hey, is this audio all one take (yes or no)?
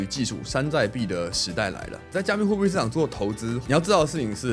no